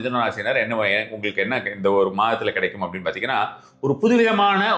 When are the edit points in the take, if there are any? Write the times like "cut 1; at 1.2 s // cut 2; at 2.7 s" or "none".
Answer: none